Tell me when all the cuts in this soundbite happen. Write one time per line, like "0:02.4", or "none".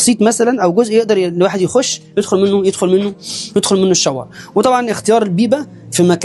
none